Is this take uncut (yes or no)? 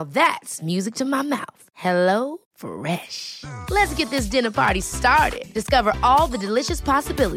yes